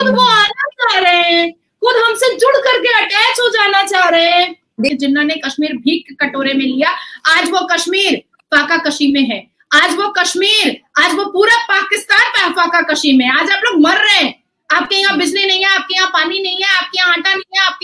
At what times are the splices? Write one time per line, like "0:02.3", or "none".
0:04.9